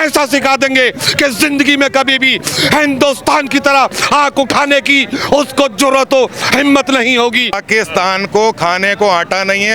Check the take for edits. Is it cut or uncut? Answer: cut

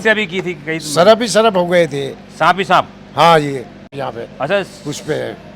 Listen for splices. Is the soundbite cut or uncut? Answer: cut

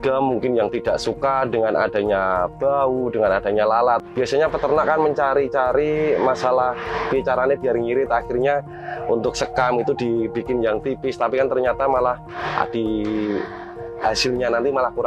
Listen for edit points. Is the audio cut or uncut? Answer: cut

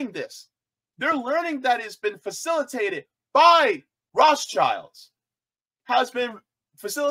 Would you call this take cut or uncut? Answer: cut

